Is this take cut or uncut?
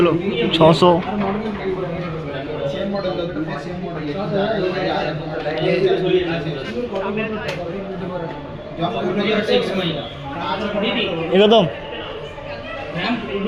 uncut